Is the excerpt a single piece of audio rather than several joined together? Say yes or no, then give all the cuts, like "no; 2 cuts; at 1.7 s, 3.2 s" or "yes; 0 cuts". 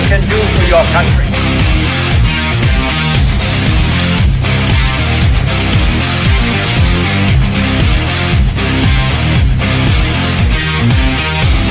yes; 0 cuts